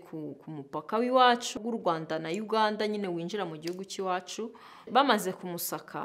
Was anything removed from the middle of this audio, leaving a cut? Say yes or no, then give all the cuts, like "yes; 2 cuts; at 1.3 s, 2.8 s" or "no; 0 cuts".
yes; 2 cuts; at 1.6 s, 4.9 s